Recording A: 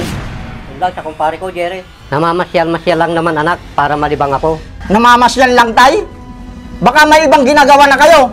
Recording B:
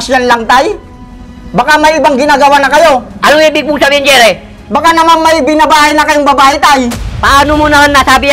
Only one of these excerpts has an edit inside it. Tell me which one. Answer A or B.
A